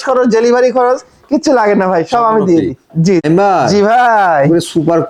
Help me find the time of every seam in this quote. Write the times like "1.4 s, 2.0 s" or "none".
none